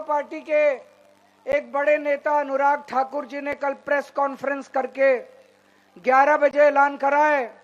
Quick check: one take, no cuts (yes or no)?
yes